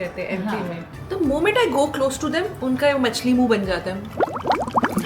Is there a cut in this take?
yes; 1 cut; at 0.9 s

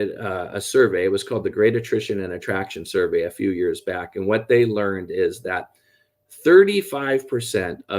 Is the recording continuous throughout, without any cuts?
yes; 0 cuts

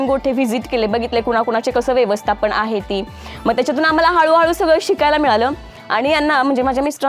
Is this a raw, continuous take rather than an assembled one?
yes; 0 cuts

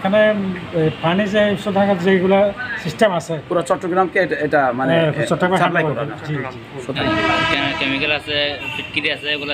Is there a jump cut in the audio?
yes; 1 cut; at 7.0 s

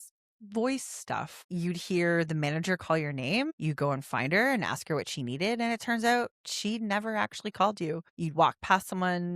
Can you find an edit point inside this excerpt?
yes; 3 cuts; at 1.4 s, 3.5 s, 8.1 s

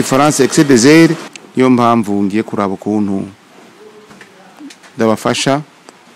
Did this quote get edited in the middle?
yes; 1 cut; at 1.3 s

